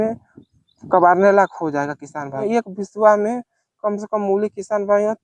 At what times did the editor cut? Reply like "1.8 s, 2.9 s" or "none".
2.4 s